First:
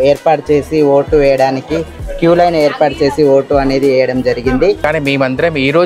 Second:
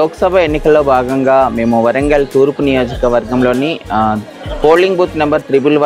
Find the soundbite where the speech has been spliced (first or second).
first